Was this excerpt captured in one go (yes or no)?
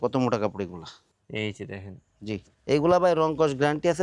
yes